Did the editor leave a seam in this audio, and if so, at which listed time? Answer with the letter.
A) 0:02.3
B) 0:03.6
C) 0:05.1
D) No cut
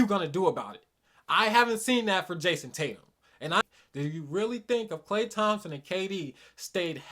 B